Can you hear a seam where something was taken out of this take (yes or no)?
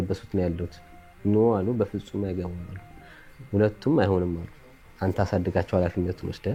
no